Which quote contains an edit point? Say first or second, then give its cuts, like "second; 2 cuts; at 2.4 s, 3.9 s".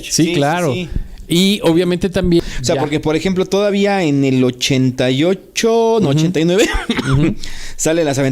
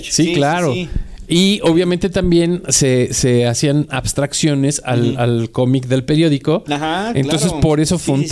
first; 1 cut; at 2.4 s